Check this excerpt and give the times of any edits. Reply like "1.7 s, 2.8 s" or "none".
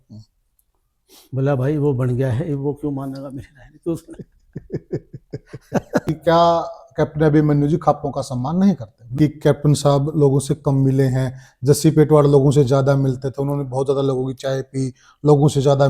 6.1 s, 9.1 s

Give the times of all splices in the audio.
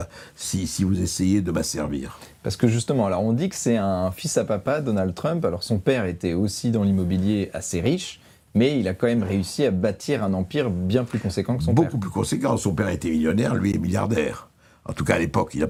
none

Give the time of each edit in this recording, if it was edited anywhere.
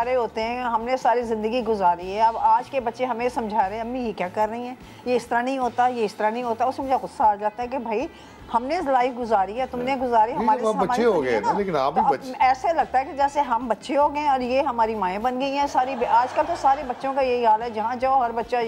none

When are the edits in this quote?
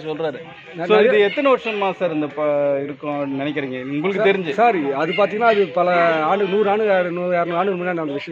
none

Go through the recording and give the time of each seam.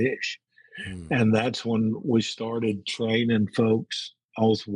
none

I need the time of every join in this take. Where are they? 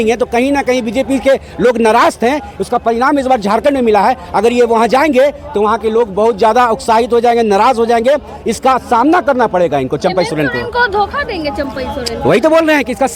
none

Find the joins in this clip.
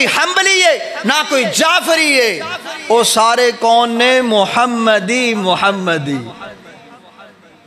none

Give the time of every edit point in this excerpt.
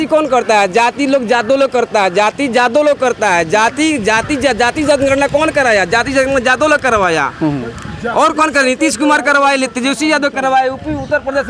none

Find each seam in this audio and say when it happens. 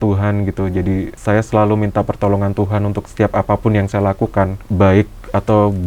1.1 s, 3.0 s, 4.6 s

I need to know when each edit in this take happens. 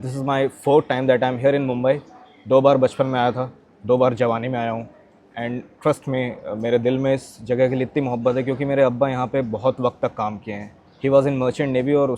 none

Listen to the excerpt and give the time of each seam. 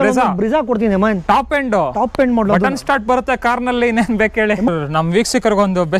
4.7 s

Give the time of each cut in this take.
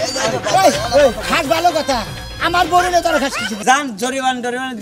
3.5 s

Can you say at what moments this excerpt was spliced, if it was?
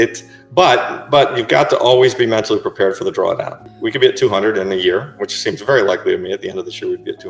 3.6 s

